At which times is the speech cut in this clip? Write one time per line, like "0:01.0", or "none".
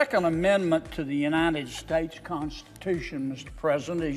none